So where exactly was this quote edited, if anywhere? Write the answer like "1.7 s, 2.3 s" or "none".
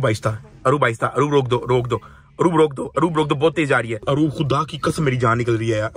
4.0 s